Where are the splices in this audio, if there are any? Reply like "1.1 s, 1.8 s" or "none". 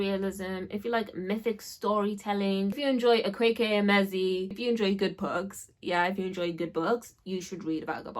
2.8 s, 4.5 s